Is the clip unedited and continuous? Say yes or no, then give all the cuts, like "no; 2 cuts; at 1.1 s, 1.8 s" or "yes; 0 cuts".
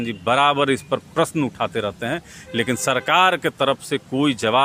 yes; 0 cuts